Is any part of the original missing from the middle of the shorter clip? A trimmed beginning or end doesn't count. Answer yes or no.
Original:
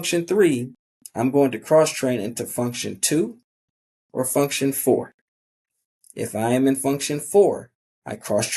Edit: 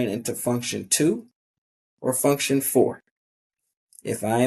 no